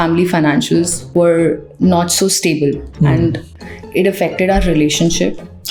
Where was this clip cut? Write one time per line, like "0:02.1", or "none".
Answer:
none